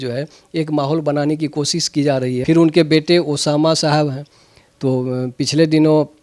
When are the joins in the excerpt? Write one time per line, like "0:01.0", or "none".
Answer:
0:02.4